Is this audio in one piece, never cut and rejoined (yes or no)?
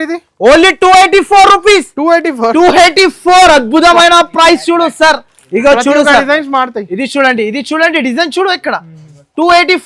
yes